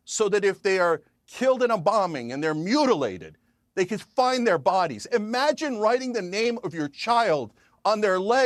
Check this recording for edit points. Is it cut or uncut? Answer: uncut